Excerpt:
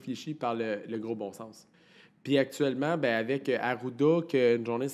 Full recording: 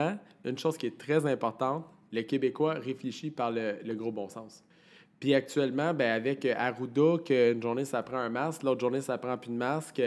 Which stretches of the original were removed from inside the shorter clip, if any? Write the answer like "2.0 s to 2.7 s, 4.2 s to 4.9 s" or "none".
none